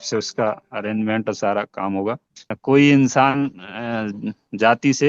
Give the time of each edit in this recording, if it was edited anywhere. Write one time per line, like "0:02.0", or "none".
0:02.5

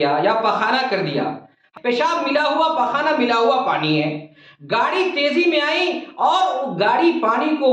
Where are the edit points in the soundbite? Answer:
0:01.7

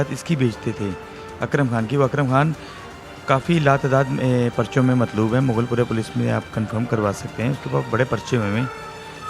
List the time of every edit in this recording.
none

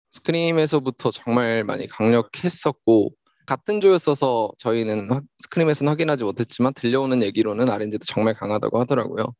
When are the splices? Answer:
0:03.4

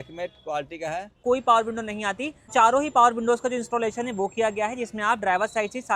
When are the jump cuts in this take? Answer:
0:01.2
0:02.4

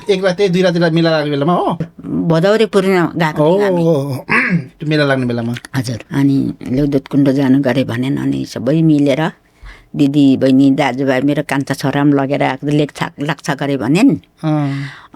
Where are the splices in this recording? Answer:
0:02.0
0:06.0

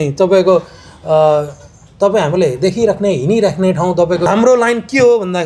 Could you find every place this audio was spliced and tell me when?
0:04.3

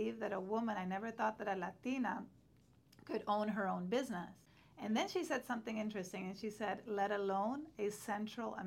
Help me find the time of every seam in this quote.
0:04.9

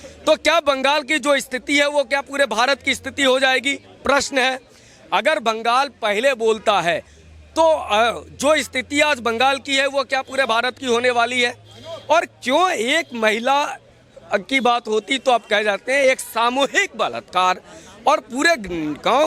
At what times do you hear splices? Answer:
none

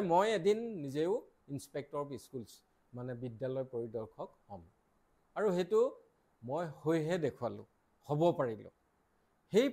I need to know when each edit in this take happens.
none

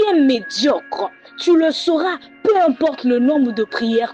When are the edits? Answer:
none

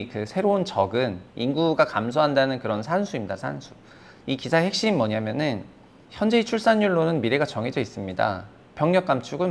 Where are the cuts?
0:01.2

